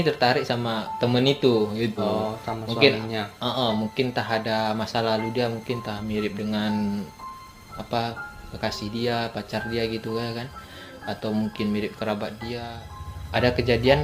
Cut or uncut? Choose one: cut